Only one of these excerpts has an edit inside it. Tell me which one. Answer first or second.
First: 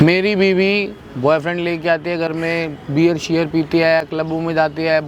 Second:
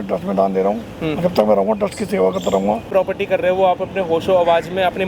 second